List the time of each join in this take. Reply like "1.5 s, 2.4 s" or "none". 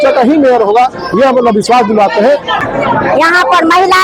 2.6 s